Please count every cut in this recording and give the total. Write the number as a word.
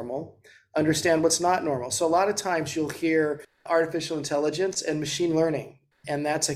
one